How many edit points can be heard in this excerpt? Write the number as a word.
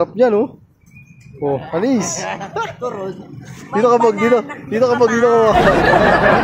one